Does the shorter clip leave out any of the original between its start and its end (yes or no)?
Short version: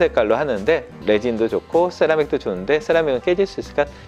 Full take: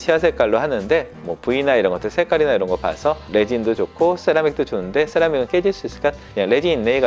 yes